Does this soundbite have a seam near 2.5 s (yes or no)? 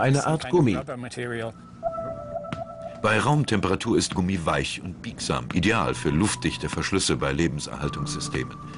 yes